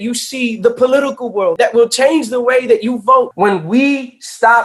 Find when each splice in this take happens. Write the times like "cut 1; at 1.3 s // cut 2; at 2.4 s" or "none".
cut 1; at 1.5 s // cut 2; at 3.3 s